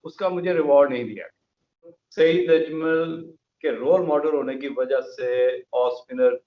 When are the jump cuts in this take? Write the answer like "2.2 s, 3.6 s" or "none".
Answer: 2.0 s